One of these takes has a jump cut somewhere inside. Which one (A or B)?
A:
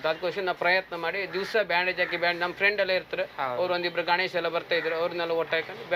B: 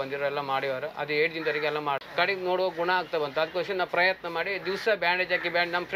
B